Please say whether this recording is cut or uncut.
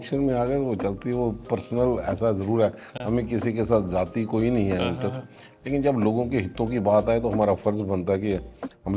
uncut